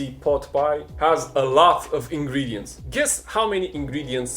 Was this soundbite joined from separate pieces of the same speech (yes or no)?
yes